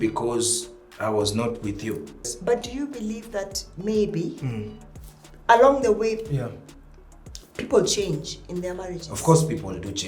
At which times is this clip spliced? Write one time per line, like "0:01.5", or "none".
0:02.3